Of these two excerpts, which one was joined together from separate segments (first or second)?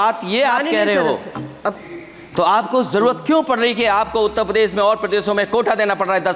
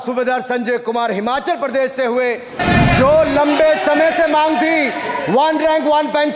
second